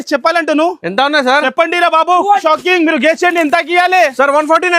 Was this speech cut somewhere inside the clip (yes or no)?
yes